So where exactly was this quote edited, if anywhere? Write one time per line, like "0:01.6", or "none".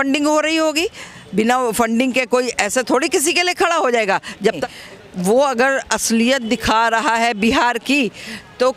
0:04.6

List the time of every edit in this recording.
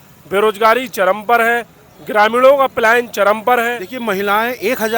0:03.9

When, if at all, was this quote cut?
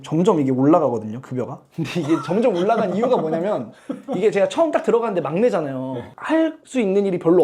none

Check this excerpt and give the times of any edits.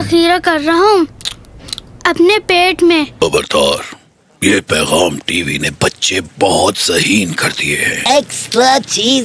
0:03.1
0:08.0

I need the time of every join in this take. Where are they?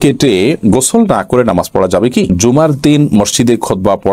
0:02.3

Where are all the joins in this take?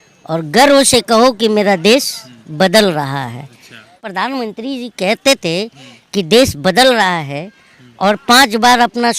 0:04.1

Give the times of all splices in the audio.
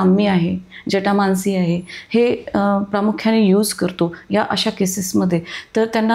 none

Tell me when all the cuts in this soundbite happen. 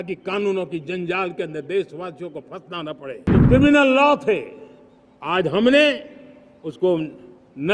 0:03.3

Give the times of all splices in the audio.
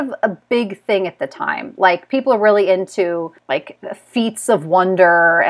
0:03.3

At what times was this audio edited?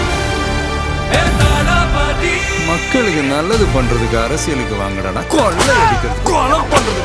none

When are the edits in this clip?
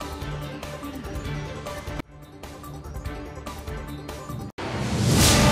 0:04.5

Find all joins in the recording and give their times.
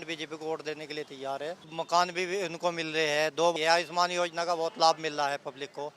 0:01.7
0:03.5

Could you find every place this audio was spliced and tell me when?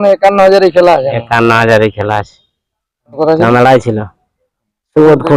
0:03.2

